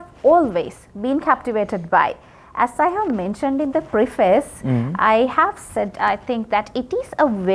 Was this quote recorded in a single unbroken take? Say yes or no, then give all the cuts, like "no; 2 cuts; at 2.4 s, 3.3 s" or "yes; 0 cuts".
yes; 0 cuts